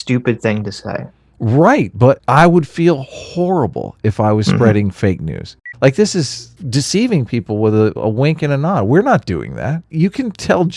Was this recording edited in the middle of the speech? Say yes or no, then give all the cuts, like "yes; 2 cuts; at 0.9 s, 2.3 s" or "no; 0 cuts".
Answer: yes; 4 cuts; at 2.2 s, 5.6 s, 6.6 s, 9.9 s